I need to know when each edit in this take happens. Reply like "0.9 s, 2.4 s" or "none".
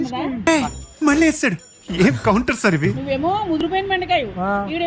3.0 s